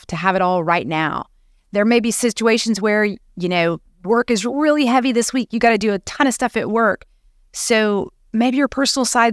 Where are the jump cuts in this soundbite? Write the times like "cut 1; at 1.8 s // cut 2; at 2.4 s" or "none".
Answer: none